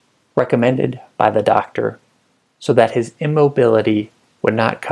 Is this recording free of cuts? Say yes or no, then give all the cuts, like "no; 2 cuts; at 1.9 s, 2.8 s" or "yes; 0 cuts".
yes; 0 cuts